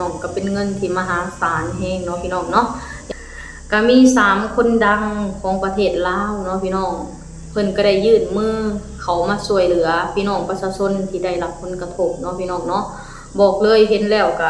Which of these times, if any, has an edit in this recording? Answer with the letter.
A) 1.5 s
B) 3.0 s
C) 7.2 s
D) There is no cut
B